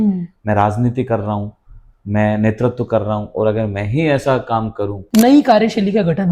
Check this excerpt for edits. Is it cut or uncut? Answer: cut